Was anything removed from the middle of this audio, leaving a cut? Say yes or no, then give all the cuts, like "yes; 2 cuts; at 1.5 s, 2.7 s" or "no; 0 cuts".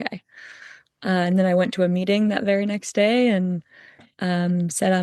no; 0 cuts